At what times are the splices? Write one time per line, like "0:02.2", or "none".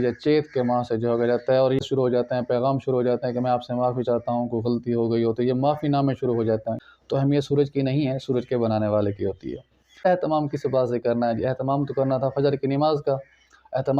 0:01.8
0:06.8
0:10.1